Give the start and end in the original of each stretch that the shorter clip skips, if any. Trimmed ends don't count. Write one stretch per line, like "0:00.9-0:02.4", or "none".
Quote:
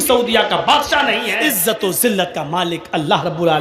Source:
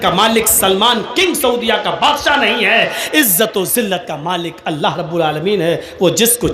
0:02.6-0:03.0